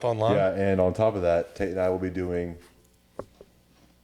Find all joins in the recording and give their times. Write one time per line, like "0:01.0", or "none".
none